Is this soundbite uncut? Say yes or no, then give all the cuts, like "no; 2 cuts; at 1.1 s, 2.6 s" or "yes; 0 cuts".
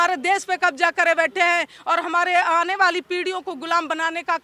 yes; 0 cuts